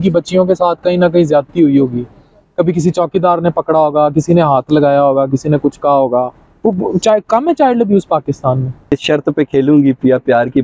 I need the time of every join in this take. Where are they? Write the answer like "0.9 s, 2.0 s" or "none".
9.0 s